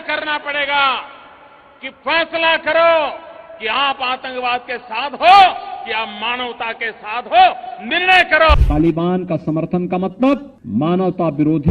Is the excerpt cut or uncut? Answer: cut